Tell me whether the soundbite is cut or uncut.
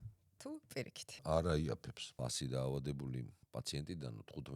cut